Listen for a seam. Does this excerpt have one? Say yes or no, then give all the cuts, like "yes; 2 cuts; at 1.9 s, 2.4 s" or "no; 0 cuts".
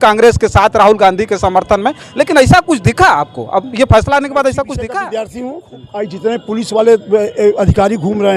yes; 1 cut; at 4.8 s